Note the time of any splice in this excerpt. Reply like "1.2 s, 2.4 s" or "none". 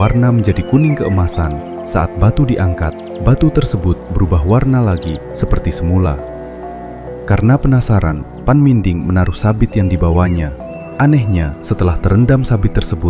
none